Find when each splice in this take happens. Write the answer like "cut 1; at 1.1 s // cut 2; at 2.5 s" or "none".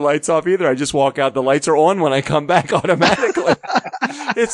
none